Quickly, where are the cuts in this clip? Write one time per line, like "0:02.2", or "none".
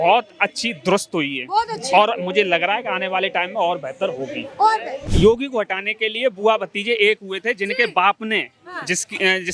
0:05.0